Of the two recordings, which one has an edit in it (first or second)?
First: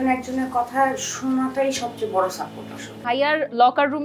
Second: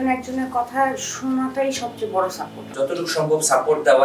second